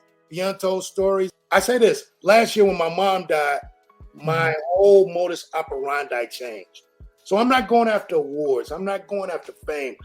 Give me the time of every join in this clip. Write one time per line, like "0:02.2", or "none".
0:01.3